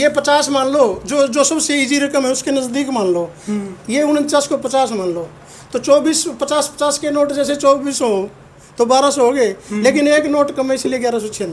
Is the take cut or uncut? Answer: uncut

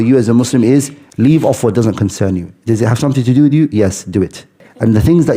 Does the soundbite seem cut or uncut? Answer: cut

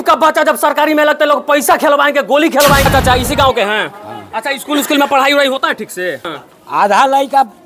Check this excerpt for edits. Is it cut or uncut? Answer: cut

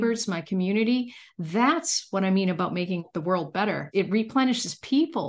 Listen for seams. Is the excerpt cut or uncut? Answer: cut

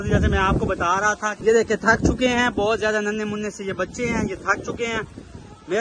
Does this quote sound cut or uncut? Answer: cut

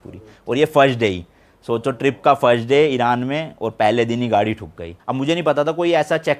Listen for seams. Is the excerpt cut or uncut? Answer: cut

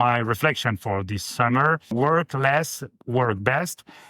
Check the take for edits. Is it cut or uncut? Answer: cut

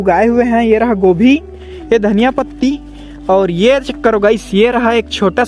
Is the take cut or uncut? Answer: uncut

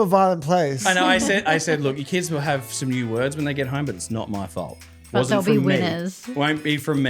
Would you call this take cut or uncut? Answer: uncut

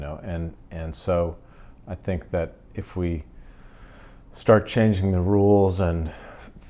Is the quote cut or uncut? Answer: uncut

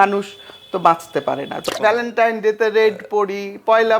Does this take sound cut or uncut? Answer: cut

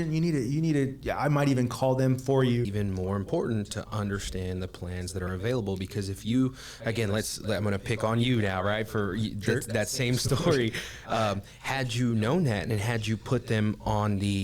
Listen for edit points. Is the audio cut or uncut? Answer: cut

